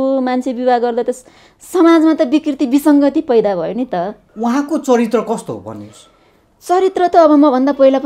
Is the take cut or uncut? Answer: cut